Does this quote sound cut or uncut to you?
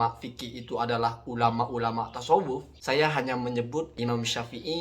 cut